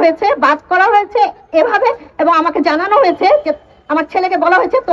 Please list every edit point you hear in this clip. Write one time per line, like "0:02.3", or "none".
none